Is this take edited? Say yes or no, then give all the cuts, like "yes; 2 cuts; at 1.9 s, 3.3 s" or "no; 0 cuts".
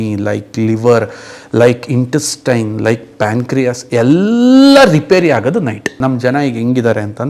yes; 1 cut; at 5.9 s